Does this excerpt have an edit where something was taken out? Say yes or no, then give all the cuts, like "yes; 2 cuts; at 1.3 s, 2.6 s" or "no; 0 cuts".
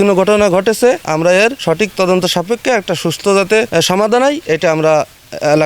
yes; 2 cuts; at 1.2 s, 3.7 s